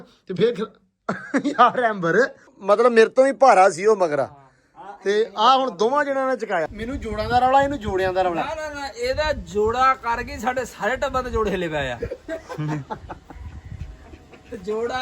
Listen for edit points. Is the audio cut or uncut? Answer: cut